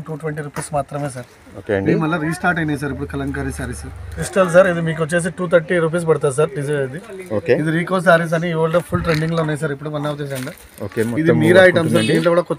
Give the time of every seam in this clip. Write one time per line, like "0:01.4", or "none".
0:04.2

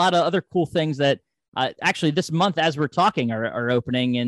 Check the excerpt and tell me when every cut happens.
none

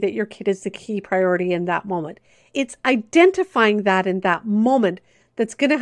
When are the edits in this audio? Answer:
0:02.5

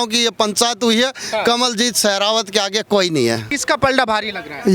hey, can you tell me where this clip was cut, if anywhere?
0:03.5

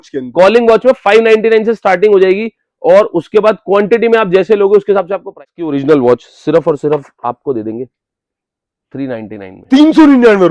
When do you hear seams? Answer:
0:05.4

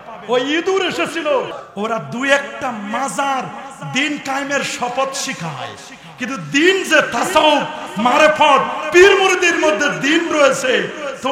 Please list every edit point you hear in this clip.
0:01.6

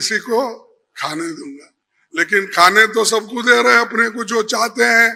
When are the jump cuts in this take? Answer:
none

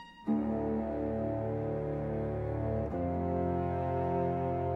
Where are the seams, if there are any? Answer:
0:02.7

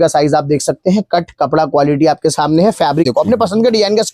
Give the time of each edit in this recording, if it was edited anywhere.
0:03.1

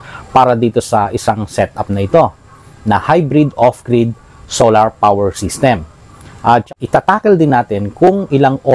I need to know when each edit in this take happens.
0:06.7

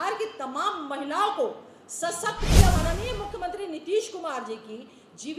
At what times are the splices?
0:02.8

